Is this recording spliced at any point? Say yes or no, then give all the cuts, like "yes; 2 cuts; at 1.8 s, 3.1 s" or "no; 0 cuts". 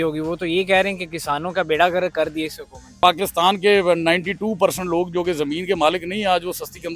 yes; 1 cut; at 3.0 s